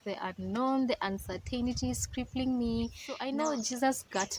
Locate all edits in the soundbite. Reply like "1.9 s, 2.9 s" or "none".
3.1 s